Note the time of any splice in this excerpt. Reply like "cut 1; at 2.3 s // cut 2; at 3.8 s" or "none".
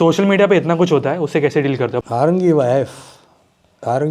cut 1; at 2.0 s